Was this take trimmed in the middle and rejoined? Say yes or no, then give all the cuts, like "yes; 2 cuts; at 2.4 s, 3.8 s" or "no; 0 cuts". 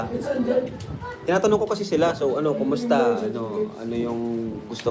no; 0 cuts